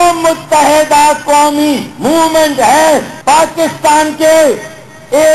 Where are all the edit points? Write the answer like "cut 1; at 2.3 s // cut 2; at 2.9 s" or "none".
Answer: cut 1; at 3.1 s // cut 2; at 4.2 s

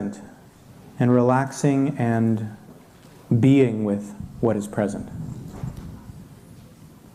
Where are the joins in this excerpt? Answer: none

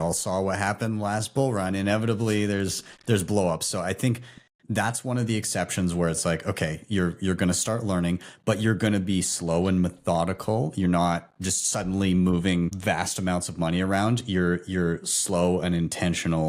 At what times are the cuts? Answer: none

